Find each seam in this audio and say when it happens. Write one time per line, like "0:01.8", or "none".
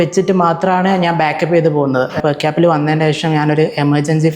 0:02.2